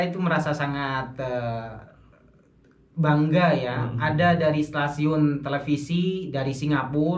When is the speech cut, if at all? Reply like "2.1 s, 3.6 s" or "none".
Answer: none